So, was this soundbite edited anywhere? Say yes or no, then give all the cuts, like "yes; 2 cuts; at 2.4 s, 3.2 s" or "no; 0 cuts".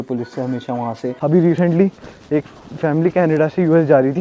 yes; 1 cut; at 1.1 s